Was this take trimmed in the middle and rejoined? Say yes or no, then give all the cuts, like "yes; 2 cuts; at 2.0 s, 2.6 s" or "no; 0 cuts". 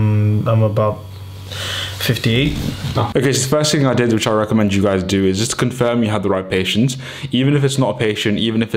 no; 0 cuts